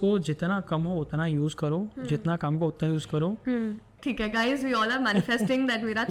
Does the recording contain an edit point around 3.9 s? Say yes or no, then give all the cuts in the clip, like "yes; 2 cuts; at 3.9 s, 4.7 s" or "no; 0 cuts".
yes; 1 cut; at 3.9 s